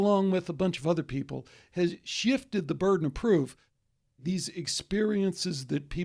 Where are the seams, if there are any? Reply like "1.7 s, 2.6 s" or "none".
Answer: 4.0 s